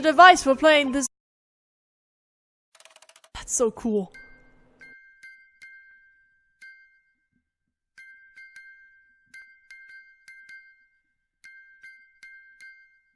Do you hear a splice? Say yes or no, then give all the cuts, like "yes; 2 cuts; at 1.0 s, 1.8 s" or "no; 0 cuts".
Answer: no; 0 cuts